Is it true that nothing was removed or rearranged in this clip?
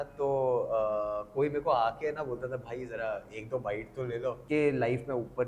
no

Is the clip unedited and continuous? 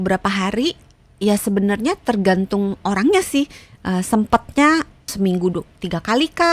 no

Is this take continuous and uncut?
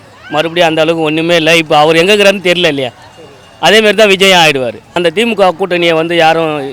no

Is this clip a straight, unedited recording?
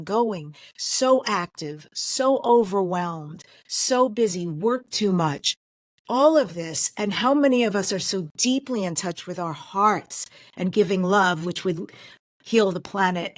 yes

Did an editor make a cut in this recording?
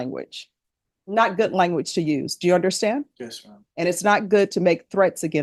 no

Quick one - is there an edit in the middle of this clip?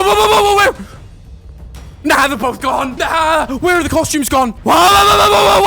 yes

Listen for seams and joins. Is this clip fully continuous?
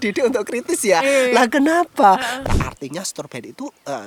no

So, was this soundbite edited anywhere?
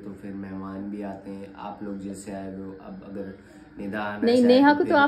no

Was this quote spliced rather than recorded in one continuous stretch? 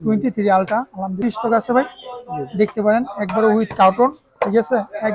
yes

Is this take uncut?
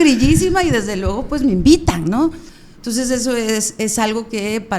no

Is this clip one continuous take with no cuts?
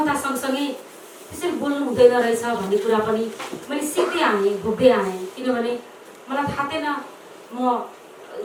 yes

